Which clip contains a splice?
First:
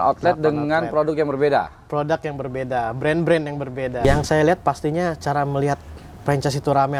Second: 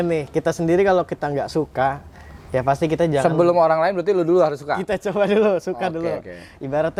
first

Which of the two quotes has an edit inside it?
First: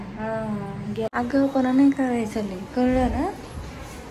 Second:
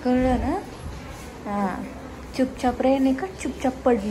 first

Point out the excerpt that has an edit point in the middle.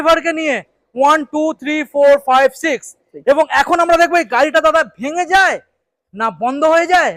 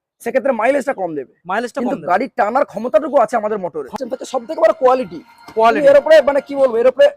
second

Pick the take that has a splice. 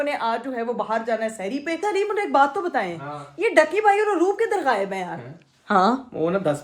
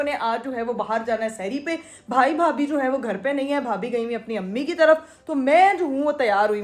first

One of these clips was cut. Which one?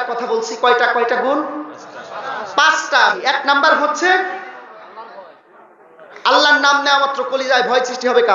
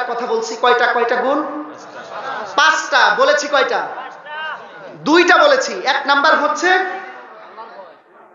first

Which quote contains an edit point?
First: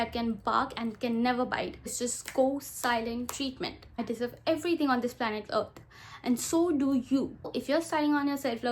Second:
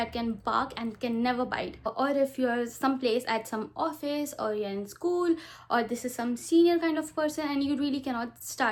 first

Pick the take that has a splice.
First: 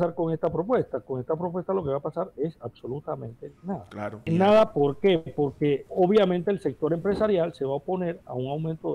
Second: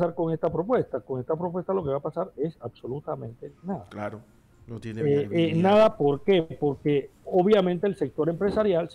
first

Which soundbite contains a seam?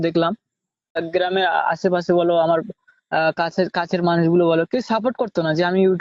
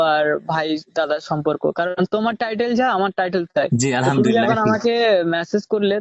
first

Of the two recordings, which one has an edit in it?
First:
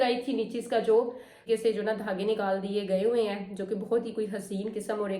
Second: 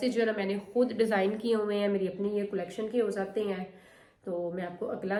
first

